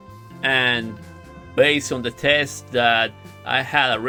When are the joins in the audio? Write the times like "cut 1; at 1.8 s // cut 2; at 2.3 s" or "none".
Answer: none